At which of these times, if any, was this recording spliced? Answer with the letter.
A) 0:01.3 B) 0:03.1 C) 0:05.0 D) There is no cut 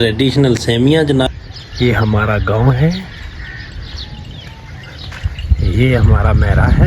A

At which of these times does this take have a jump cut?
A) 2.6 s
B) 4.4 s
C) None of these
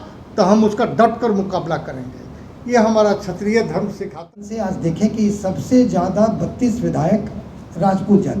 B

